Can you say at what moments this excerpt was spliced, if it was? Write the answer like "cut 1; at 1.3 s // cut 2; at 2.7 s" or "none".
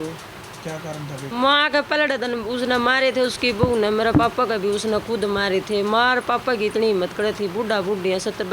cut 1; at 1.2 s